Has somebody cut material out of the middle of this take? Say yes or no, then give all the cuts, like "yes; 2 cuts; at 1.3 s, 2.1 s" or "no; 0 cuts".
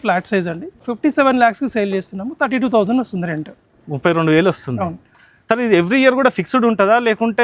no; 0 cuts